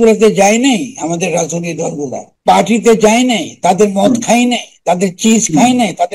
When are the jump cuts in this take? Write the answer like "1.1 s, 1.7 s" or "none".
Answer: 2.3 s